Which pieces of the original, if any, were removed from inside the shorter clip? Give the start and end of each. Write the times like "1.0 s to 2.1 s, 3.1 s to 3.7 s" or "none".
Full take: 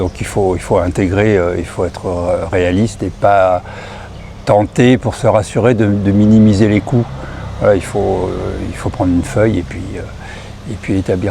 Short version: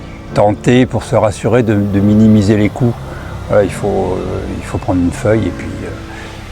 none

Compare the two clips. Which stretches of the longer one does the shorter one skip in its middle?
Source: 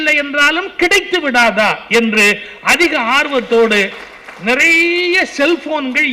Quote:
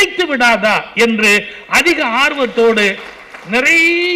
none

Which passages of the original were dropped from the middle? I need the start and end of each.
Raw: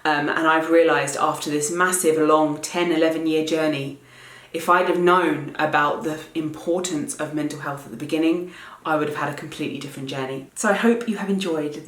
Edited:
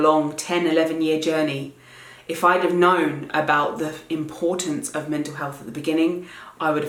none

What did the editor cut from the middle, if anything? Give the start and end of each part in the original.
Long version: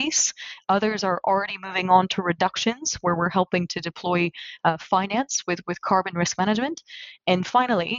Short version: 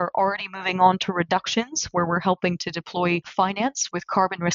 4.6 s to 5.3 s

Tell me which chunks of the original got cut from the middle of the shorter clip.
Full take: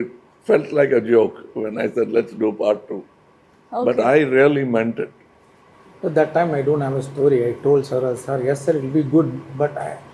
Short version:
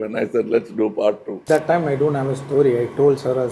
3.1 s to 6.1 s

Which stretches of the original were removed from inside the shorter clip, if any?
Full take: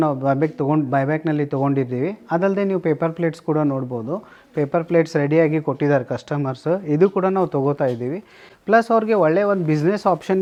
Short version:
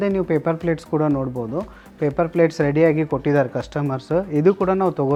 none

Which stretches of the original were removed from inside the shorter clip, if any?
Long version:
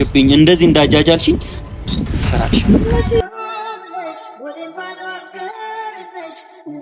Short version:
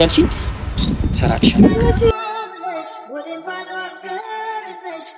3.2 s to 3.4 s

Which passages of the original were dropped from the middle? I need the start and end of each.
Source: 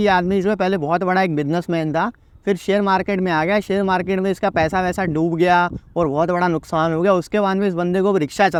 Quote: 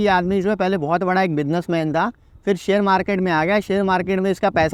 none

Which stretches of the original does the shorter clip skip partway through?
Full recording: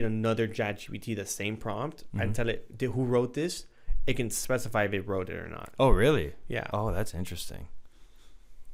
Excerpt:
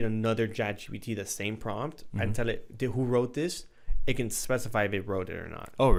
none

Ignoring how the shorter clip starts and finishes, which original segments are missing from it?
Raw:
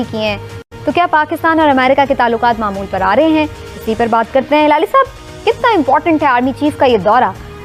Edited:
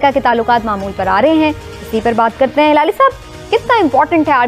none

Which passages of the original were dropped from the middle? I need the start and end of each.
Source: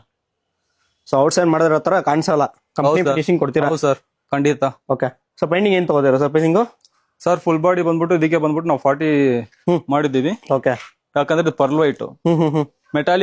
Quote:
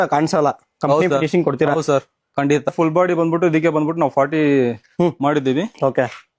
4.7 s to 7.4 s

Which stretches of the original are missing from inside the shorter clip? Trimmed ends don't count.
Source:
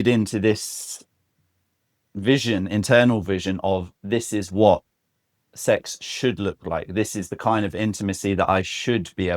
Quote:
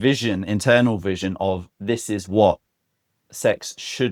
none

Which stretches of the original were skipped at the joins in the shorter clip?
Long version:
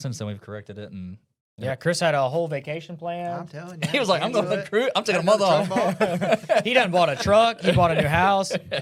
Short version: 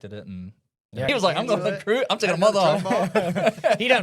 1.7 s to 3.9 s

